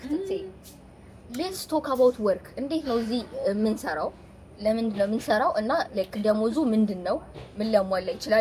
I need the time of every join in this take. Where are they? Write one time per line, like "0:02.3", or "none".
none